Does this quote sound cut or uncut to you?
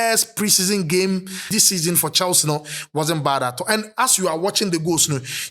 cut